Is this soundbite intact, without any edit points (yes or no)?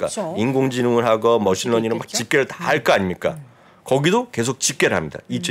yes